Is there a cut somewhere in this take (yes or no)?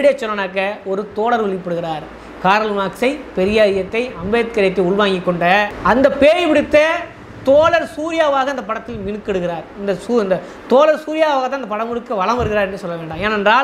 no